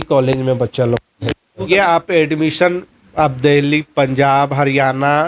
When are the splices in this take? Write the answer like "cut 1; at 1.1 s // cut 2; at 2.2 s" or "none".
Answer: cut 1; at 1.5 s